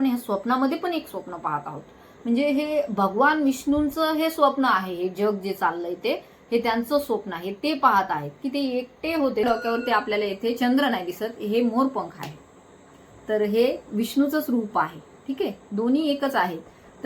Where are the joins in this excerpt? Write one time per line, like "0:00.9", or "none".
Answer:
0:09.4